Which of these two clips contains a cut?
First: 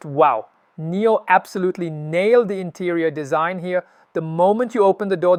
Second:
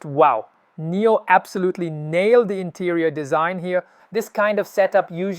second; 1 cut; at 4.0 s

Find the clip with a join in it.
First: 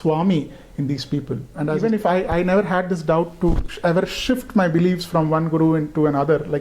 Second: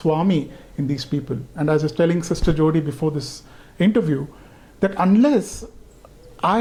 first; 1 cut; at 1.8 s

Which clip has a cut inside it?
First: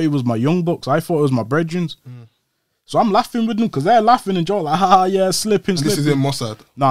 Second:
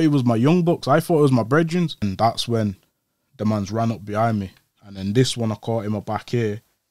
second; 1 cut; at 2.0 s

